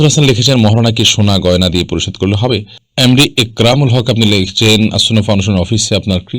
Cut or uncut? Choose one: cut